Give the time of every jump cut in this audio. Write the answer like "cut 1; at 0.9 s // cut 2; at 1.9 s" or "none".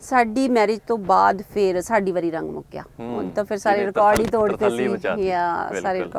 none